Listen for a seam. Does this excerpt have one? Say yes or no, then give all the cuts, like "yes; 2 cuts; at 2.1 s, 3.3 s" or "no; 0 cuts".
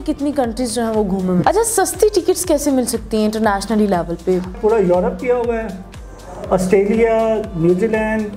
yes; 2 cuts; at 1.4 s, 4.5 s